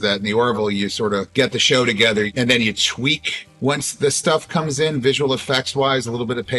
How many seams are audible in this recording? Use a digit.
0